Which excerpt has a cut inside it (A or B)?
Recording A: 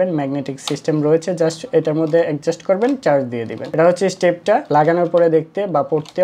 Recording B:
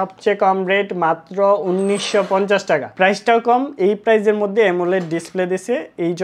B